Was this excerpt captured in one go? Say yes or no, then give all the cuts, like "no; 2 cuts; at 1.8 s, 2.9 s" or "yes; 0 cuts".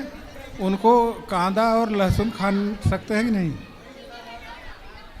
yes; 0 cuts